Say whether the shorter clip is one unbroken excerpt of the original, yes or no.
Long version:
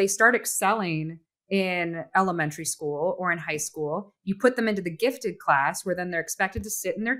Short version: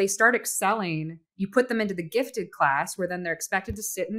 no